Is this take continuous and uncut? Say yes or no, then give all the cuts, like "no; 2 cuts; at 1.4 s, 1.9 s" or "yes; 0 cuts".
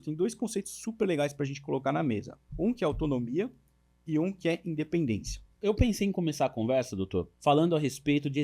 no; 3 cuts; at 2.4 s, 5.5 s, 7.3 s